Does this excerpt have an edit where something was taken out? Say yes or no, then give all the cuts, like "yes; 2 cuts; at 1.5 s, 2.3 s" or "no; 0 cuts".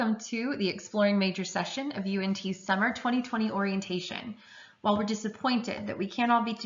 no; 0 cuts